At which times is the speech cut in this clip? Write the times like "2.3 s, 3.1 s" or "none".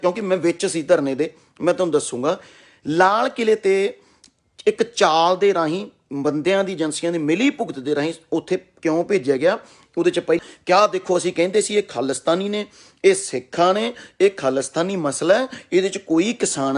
10.4 s